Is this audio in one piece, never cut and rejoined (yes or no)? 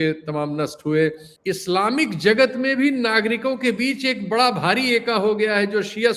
no